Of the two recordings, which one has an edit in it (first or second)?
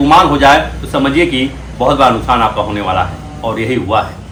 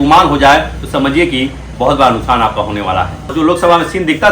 second